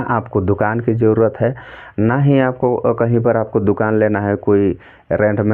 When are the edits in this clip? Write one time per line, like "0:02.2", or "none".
none